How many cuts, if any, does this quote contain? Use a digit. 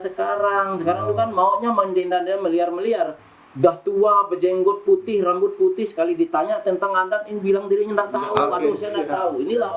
1